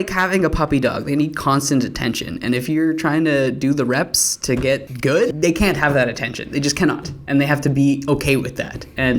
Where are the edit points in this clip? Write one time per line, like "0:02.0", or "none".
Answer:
0:05.2

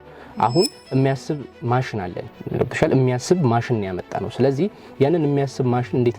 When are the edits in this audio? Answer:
0:02.3

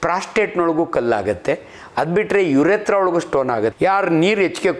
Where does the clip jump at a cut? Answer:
0:03.7

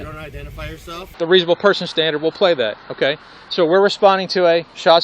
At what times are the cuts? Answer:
0:01.1

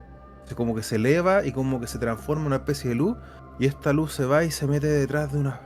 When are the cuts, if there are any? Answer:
none

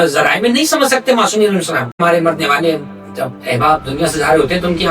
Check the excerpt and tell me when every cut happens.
0:02.0

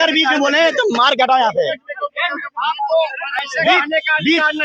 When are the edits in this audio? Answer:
none

